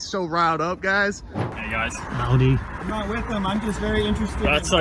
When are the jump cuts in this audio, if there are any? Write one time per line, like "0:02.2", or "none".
0:01.5

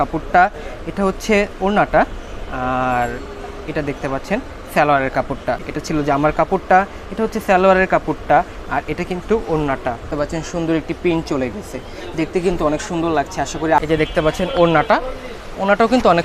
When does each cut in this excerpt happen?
0:05.7
0:10.1
0:13.8

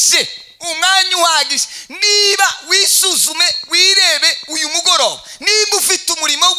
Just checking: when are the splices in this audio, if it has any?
none

